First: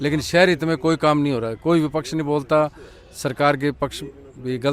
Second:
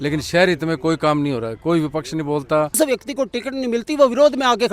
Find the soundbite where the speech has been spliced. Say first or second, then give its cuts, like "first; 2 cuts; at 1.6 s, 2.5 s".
second; 1 cut; at 2.8 s